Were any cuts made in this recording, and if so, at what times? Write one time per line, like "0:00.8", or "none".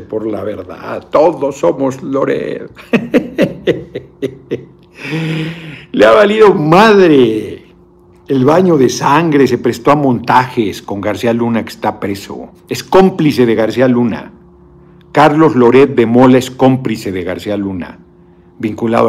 0:04.9

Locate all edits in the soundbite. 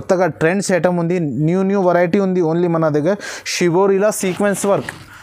none

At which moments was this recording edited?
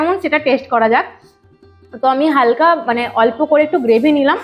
none

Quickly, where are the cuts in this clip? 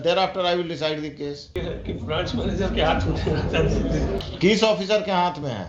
0:01.6
0:04.2

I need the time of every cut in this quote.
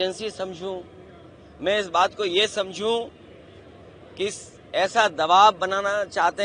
none

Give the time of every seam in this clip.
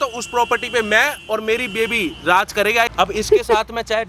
0:02.9

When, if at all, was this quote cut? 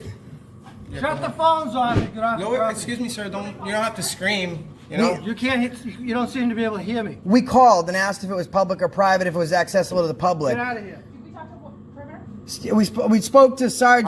none

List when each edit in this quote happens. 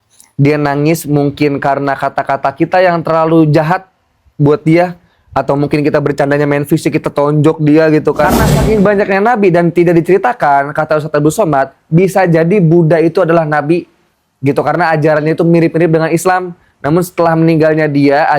0:08.5

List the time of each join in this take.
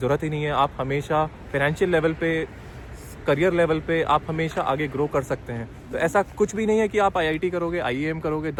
none

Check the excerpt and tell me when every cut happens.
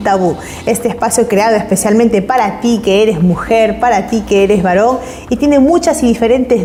none

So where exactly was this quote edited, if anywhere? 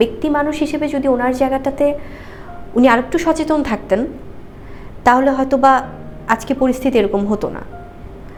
none

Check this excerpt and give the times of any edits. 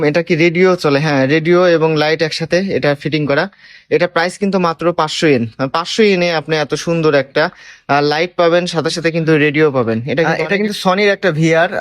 0:10.4

